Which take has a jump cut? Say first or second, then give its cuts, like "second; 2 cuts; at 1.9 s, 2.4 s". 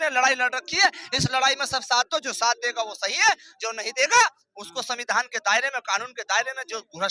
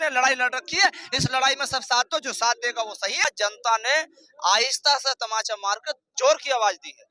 second; 1 cut; at 3.3 s